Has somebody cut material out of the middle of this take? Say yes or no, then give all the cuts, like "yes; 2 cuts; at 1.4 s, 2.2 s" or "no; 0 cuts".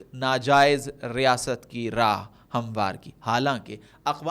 no; 0 cuts